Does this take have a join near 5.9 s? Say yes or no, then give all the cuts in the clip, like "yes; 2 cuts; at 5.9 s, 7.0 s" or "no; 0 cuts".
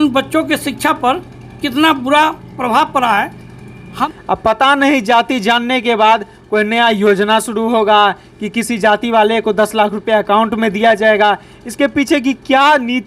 no; 1 cut; at 4.1 s